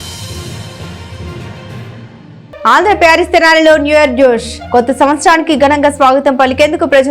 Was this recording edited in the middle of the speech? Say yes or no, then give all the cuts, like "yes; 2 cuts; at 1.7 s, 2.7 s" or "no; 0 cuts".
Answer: yes; 1 cut; at 2.4 s